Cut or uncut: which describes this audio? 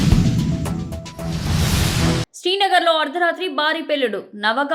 cut